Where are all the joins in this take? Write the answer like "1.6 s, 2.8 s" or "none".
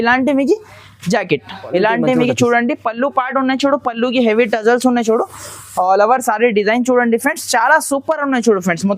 1.5 s